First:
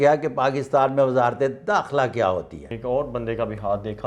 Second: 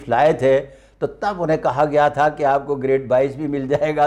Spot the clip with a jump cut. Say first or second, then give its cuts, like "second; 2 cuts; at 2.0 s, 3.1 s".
first; 1 cut; at 2.7 s